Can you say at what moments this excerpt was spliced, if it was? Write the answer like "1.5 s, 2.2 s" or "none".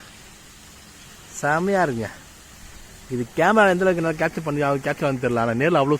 none